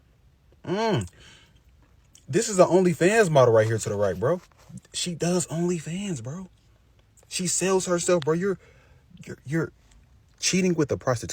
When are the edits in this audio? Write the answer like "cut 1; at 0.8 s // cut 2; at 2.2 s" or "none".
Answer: none